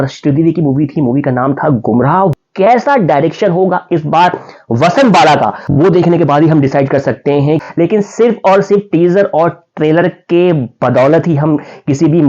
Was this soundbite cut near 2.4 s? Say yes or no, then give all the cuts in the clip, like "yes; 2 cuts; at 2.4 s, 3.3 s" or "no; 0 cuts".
yes; 2 cuts; at 2.4 s, 7.6 s